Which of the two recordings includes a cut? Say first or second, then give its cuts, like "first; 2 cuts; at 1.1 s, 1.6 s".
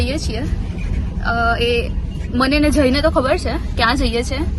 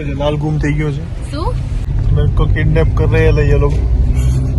second; 1 cut; at 1.8 s